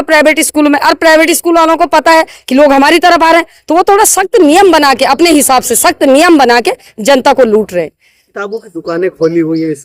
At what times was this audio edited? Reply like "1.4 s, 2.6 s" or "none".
none